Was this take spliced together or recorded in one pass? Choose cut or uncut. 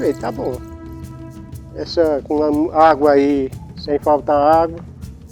uncut